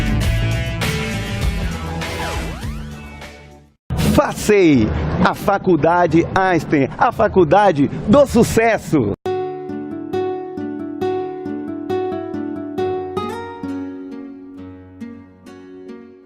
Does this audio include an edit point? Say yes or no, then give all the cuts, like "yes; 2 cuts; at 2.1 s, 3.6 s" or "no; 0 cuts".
yes; 1 cut; at 3.9 s